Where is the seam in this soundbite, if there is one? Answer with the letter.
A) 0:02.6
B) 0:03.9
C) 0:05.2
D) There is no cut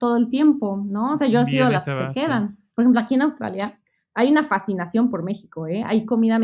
A